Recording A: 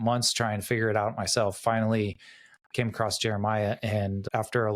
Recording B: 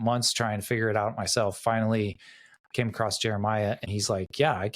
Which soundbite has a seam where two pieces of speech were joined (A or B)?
B